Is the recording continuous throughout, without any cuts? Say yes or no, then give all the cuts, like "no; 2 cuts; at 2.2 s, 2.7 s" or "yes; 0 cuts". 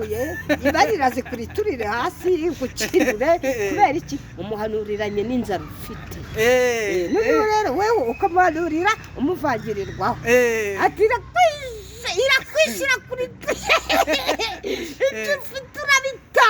yes; 0 cuts